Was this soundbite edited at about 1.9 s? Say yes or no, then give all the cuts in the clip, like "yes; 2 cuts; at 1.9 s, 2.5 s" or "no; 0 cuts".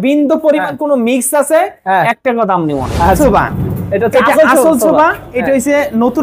no; 1 cut; at 3.2 s